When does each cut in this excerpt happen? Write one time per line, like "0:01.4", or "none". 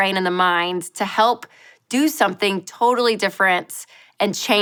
none